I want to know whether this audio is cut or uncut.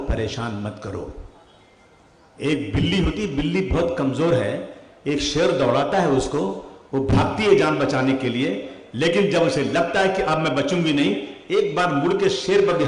uncut